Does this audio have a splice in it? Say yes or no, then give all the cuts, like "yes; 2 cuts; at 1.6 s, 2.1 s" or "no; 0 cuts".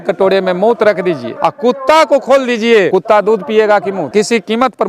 yes; 3 cuts; at 1.3 s, 2.9 s, 4.1 s